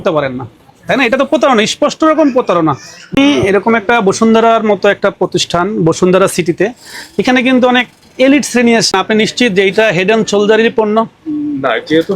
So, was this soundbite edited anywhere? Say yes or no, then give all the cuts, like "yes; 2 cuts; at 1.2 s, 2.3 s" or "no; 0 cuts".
yes; 2 cuts; at 3.2 s, 8.9 s